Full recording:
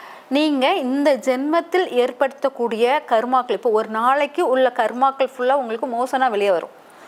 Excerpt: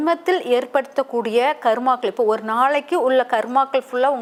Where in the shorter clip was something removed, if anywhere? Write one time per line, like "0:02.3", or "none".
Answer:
none